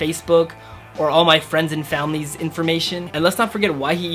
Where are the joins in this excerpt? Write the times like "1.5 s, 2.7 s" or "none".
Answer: 3.1 s